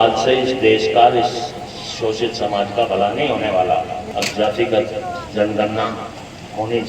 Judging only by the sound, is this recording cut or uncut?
cut